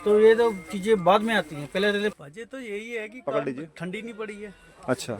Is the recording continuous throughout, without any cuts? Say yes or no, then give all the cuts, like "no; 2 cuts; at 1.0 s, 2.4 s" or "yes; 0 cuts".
no; 1 cut; at 2.1 s